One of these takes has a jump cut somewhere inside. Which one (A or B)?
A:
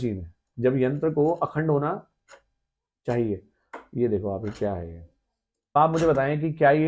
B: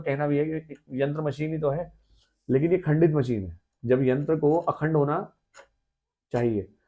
A